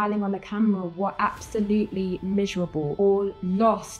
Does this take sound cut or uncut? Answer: cut